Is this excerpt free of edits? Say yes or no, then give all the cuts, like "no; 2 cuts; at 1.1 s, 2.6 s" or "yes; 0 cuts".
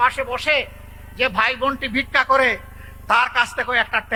yes; 0 cuts